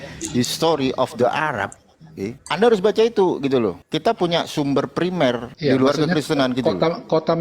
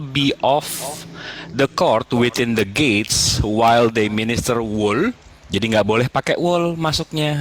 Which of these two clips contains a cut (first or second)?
first